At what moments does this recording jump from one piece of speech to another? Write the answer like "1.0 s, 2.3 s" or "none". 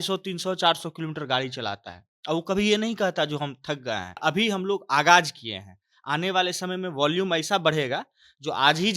4.2 s